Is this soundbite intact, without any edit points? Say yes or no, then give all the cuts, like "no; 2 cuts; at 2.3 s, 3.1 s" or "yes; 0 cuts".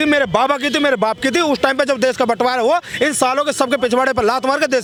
yes; 0 cuts